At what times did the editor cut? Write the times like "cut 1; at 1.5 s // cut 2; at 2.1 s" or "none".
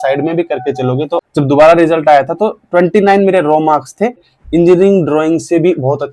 cut 1; at 1.2 s // cut 2; at 4.3 s